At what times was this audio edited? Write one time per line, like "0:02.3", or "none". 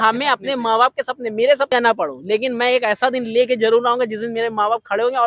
0:01.7